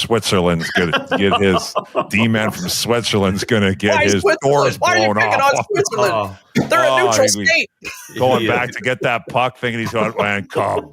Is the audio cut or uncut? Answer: uncut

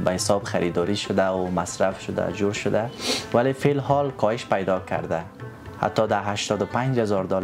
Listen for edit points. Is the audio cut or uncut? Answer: uncut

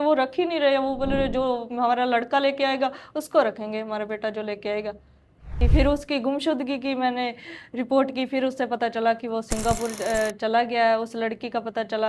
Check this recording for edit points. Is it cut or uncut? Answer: cut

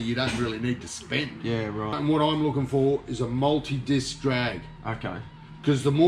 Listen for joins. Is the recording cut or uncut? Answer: cut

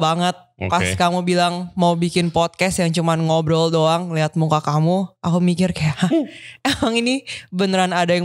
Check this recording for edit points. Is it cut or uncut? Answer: uncut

